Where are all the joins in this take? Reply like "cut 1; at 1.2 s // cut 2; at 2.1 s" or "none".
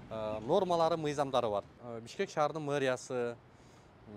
none